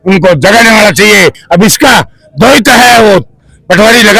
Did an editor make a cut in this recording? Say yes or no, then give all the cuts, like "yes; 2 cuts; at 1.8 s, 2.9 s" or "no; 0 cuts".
yes; 1 cut; at 1.4 s